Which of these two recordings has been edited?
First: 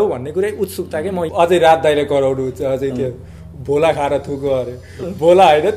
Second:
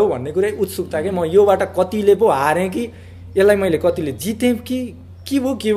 first; 1 cut; at 1.2 s

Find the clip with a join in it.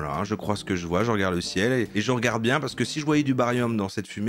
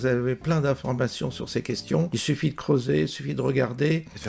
second; 1 cut; at 2.1 s

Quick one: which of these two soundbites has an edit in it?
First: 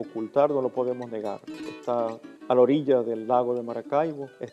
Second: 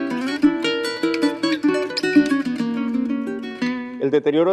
first; 1 cut; at 2.8 s

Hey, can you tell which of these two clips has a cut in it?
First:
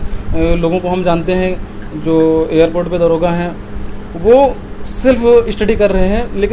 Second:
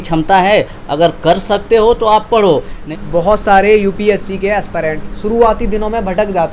second; 1 cut; at 2.8 s

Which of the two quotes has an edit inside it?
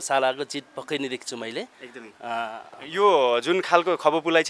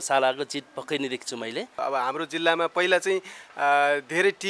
second; 1 cut; at 1.8 s

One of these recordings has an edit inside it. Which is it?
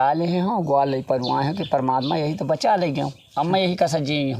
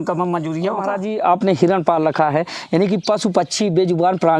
second; 1 cut; at 1.0 s

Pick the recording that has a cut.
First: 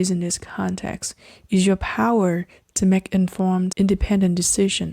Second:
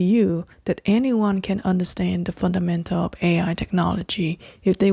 first; 1 cut; at 3.7 s

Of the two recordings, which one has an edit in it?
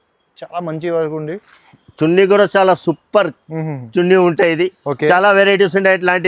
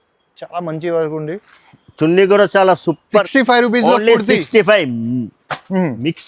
second; 1 cut; at 3.3 s

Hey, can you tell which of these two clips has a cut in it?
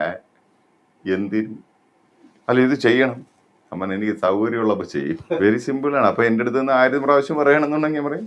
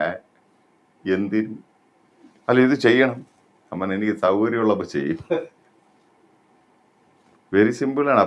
first; 1 cut; at 5.4 s

